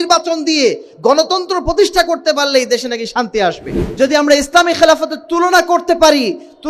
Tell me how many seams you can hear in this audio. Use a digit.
1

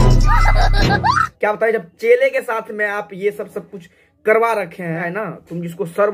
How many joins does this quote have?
2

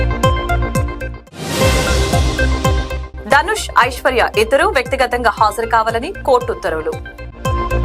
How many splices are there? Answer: 0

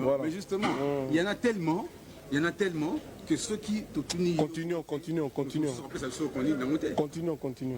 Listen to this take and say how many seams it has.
0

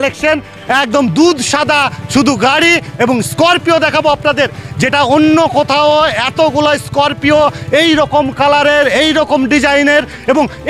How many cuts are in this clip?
0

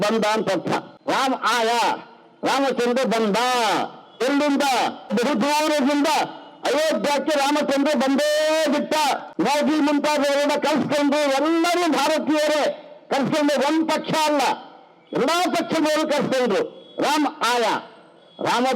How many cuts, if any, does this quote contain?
3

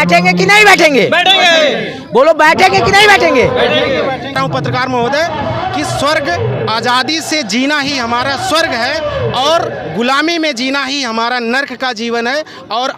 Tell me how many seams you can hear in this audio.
1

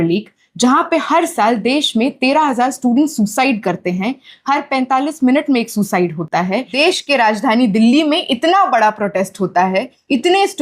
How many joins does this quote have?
1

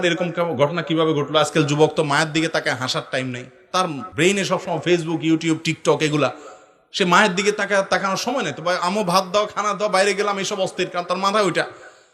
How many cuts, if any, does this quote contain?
1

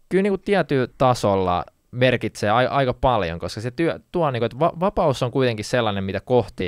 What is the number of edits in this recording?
2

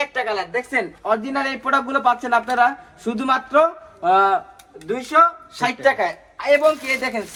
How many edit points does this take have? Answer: 0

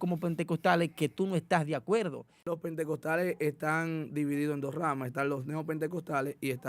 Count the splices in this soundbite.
1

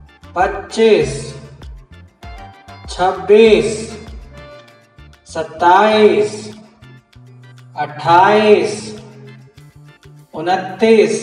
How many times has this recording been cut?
2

